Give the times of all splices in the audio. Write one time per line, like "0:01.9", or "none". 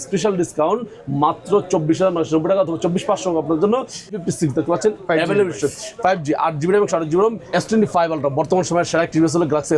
0:04.2
0:07.5